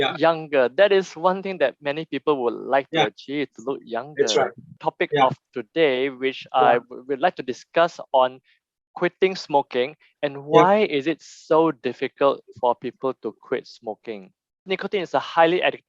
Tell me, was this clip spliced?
yes; 2 cuts; at 4.8 s, 14.7 s

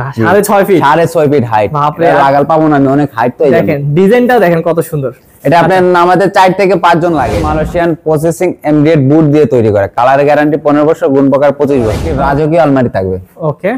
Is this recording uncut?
no; 2 cuts; at 7.5 s, 12.1 s

